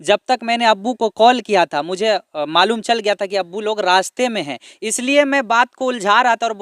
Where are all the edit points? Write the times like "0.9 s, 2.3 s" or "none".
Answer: none